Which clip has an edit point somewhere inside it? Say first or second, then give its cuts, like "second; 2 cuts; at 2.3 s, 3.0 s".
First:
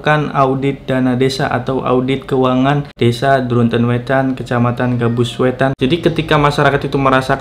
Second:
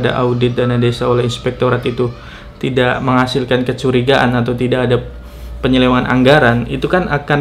first; 2 cuts; at 2.9 s, 5.7 s